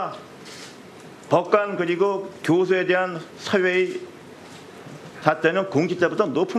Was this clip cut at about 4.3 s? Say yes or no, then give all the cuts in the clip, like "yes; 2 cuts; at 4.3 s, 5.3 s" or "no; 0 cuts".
yes; 1 cut; at 4.3 s